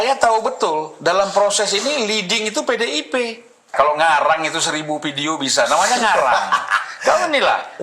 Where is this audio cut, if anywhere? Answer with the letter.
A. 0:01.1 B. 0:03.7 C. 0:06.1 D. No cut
B